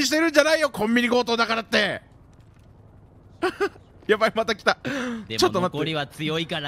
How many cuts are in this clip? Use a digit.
0